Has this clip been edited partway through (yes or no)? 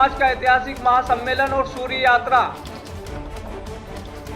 yes